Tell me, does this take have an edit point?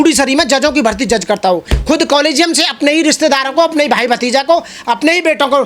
no; 0 cuts

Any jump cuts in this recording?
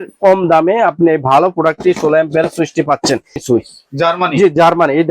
yes; 1 cut; at 3.4 s

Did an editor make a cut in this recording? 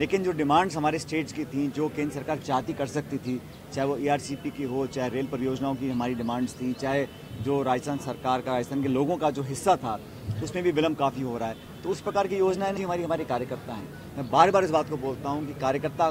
yes; 1 cut; at 12.8 s

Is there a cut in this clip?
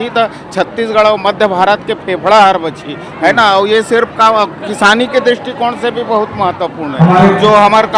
no; 0 cuts

